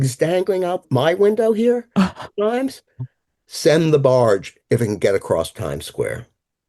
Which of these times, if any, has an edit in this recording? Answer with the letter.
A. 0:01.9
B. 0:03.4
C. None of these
B